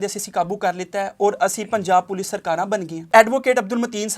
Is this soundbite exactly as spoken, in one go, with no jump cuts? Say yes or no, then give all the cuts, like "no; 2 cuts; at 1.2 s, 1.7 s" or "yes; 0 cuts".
no; 1 cut; at 3.1 s